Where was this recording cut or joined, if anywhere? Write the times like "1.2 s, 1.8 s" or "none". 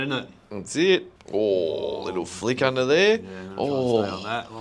1.2 s